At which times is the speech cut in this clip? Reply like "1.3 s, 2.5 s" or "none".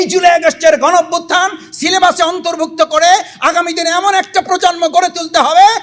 none